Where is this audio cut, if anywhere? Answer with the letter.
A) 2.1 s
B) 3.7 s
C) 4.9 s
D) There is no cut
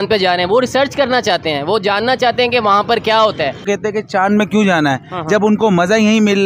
B